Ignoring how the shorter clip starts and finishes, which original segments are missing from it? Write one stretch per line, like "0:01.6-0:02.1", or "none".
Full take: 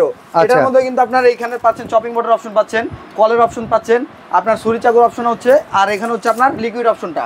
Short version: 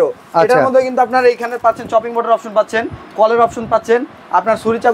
none